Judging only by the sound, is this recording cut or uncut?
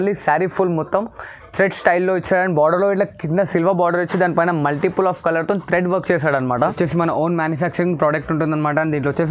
cut